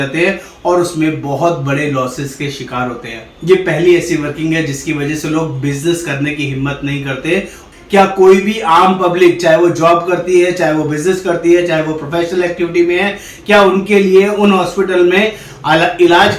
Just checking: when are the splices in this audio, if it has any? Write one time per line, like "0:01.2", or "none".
0:07.6